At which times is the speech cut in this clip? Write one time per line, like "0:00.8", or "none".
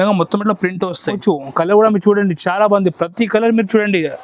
0:01.2